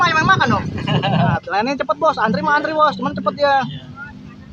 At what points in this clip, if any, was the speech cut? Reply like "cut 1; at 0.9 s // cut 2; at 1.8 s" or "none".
cut 1; at 1.4 s